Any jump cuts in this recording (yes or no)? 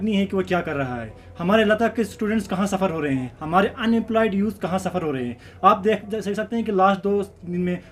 no